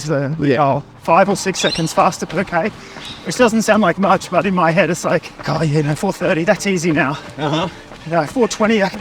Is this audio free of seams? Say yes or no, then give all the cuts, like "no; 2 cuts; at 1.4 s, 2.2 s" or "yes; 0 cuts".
no; 2 cuts; at 0.9 s, 5.3 s